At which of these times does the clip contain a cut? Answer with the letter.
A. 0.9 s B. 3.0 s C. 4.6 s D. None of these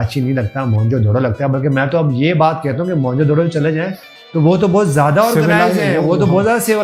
D